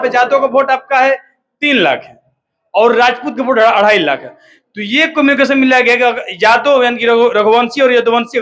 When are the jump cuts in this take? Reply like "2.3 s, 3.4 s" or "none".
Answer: none